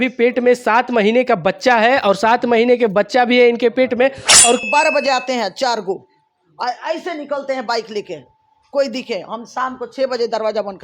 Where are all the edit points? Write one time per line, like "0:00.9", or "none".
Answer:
0:04.7